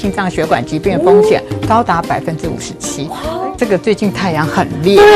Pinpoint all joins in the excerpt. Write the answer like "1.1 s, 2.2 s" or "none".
3.5 s